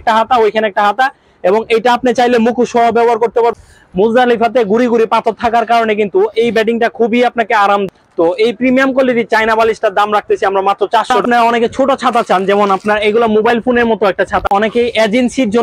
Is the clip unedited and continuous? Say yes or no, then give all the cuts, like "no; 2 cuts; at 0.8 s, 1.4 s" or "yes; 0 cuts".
no; 4 cuts; at 3.5 s, 7.8 s, 11.2 s, 14.5 s